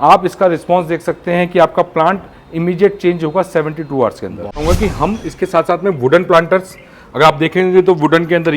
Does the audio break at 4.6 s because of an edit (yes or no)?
yes